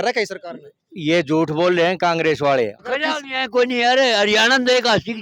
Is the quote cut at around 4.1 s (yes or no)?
no